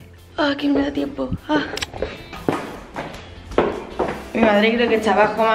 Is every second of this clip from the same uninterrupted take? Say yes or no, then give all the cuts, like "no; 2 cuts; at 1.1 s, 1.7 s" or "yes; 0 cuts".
yes; 0 cuts